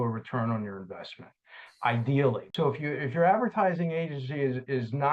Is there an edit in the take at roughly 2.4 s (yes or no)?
yes